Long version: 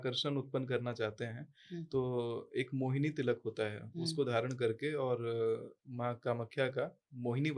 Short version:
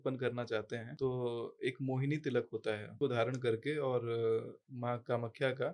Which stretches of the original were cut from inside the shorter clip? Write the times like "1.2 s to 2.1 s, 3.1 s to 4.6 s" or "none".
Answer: 1.4 s to 1.8 s, 3.9 s to 4.1 s